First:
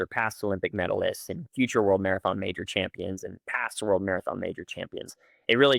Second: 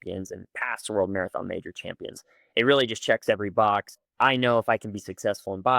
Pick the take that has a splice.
second; 1 cut; at 4.0 s

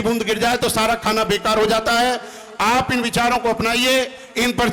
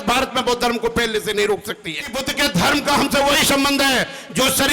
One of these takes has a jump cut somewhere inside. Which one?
second; 1 cut; at 2.2 s

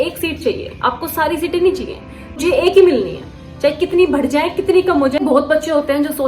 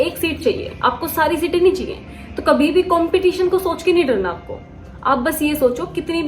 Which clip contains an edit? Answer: first; 2 cuts; at 2.4 s, 5.2 s

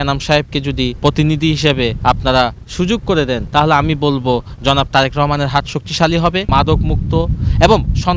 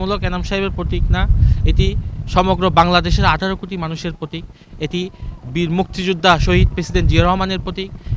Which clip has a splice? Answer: first; 4 cuts; at 0.9 s, 2.0 s, 3.4 s, 6.5 s

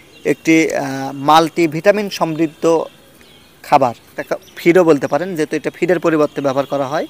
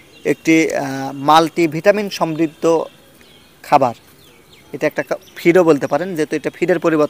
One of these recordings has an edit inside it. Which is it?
first; 1 cut; at 4.2 s

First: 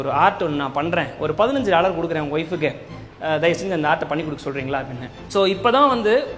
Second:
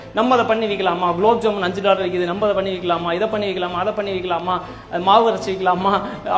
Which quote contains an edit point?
first; 1 cut; at 5.2 s

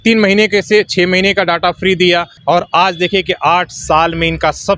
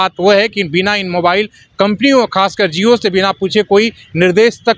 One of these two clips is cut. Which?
first; 1 cut; at 2.4 s

